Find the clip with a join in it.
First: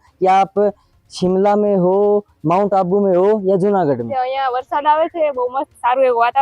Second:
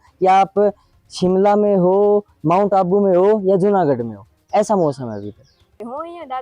first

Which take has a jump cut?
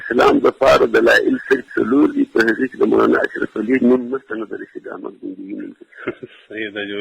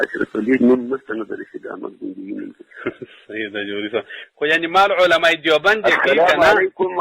first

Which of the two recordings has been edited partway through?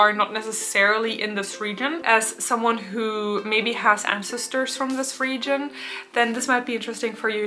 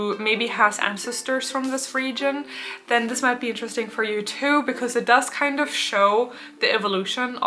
first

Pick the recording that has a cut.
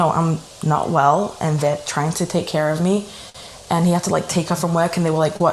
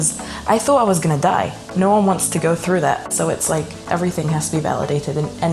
second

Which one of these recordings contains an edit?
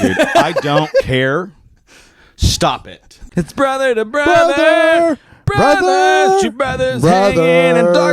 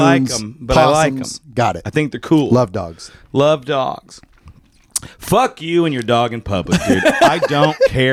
first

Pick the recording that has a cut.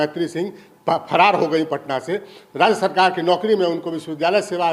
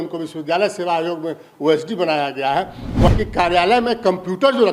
second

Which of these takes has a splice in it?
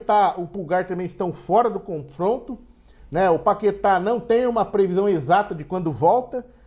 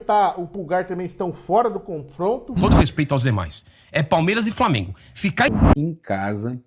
second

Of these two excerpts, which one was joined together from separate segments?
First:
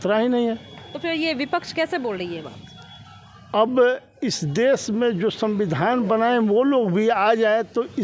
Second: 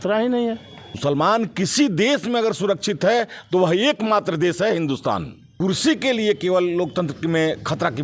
second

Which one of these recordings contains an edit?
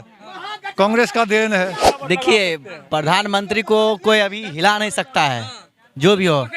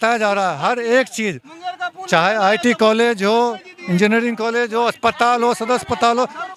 first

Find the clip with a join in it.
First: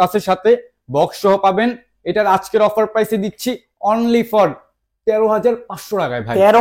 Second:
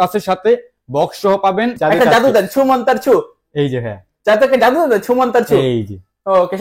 second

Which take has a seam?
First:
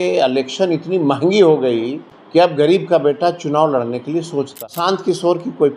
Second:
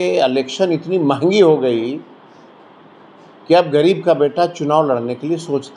first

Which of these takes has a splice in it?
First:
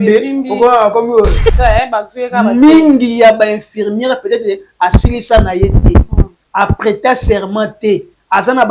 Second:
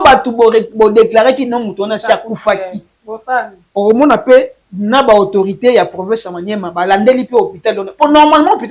first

